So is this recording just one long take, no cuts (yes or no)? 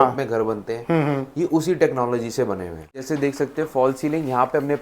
no